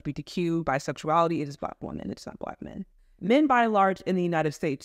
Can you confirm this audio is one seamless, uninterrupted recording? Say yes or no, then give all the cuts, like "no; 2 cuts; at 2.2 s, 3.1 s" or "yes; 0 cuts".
yes; 0 cuts